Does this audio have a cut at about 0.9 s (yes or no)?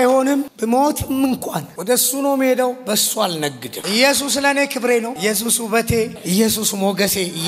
no